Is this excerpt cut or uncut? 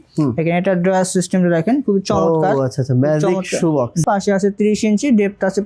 cut